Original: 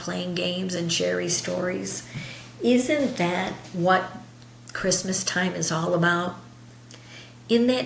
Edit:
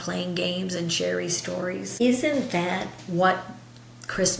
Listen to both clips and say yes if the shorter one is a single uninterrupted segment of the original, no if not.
no